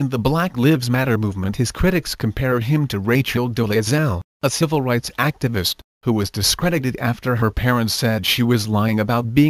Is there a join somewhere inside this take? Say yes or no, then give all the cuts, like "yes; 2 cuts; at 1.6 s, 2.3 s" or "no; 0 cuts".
no; 0 cuts